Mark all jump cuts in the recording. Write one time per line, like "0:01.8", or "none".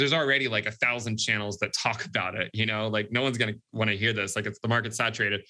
none